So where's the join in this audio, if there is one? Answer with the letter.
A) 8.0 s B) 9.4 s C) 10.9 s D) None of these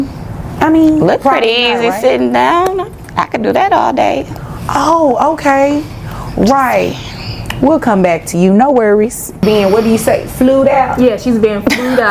B